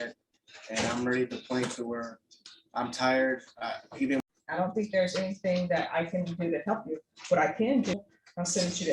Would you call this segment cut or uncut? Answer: cut